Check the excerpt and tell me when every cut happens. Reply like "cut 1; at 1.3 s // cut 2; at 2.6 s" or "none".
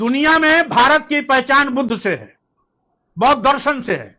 none